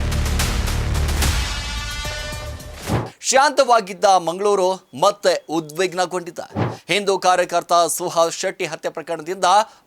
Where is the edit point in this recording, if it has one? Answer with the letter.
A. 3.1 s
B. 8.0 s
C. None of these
A